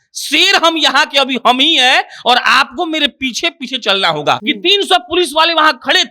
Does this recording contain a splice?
yes; 1 cut; at 4.4 s

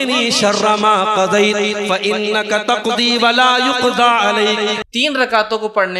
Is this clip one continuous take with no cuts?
no; 1 cut; at 4.9 s

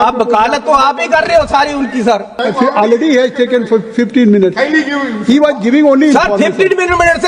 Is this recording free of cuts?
no; 1 cut; at 2.3 s

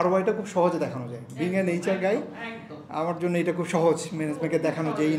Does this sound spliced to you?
no; 0 cuts

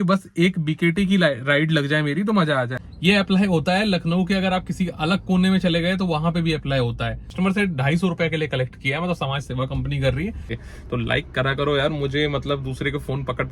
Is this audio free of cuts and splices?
no; 3 cuts; at 2.8 s, 7.3 s, 10.5 s

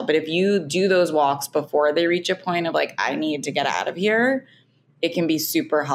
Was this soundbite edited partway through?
no; 0 cuts

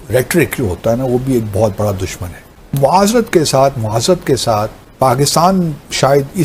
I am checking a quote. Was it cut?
yes; 2 cuts; at 2.4 s, 4.8 s

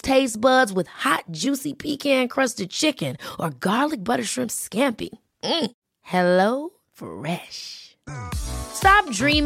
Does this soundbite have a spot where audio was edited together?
no; 0 cuts

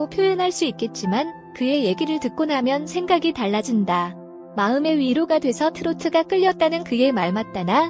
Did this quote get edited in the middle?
no; 0 cuts

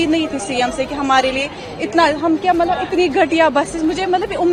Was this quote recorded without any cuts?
yes; 0 cuts

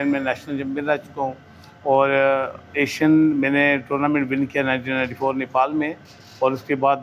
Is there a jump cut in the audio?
no; 0 cuts

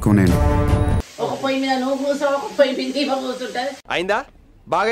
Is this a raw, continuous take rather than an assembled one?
no; 1 cut; at 1.0 s

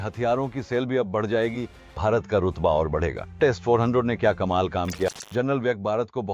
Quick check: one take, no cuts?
no; 2 cuts; at 1.8 s, 5.1 s

